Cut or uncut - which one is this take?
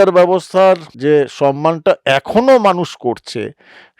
cut